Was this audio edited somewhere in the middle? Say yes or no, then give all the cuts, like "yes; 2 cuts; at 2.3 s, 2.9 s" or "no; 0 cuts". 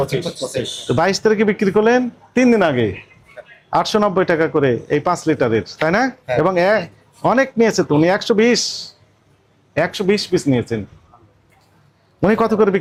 no; 0 cuts